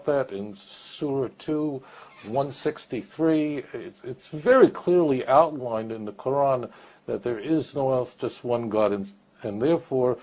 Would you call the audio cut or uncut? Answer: uncut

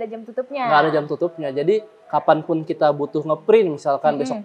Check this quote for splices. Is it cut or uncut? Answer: uncut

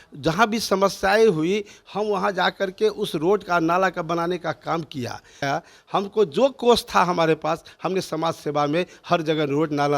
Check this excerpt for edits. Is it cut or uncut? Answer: cut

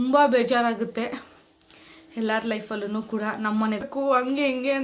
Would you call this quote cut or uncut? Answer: cut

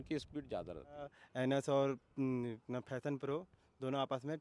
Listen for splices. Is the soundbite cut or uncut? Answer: cut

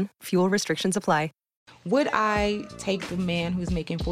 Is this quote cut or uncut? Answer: cut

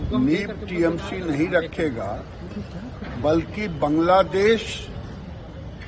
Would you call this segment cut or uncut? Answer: uncut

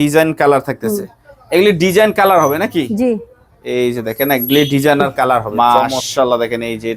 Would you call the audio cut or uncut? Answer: cut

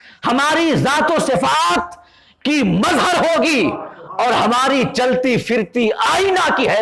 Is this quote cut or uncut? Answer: uncut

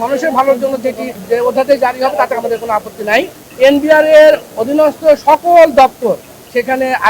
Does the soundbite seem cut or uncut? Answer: cut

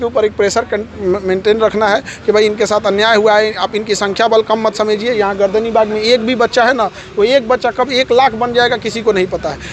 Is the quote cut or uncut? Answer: uncut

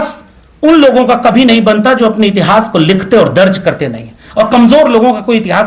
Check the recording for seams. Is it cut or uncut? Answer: uncut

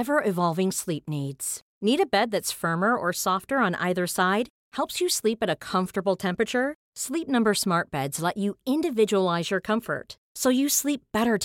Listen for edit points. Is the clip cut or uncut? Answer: uncut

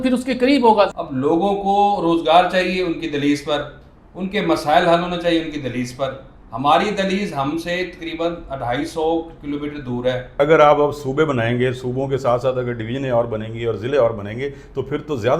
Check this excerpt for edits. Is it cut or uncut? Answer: cut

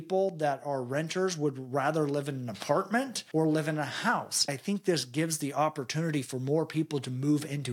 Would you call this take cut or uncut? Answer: cut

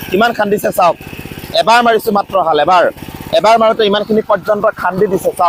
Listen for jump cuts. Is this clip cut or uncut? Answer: uncut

